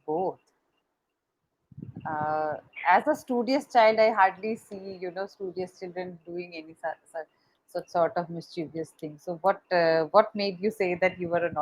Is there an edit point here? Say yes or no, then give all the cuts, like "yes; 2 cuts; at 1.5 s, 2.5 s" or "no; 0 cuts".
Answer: no; 0 cuts